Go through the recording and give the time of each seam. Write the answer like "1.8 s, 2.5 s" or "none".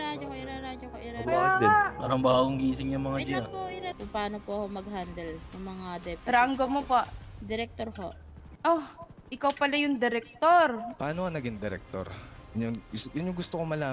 3.9 s, 10.9 s